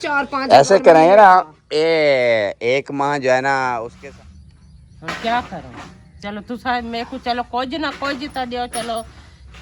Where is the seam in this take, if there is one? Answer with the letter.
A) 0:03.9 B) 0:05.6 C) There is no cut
A